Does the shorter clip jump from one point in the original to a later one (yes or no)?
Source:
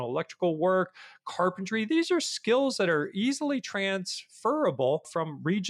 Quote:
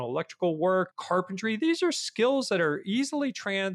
yes